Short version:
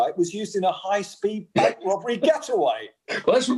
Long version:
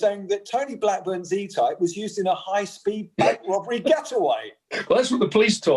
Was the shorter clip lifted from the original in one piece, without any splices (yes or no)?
yes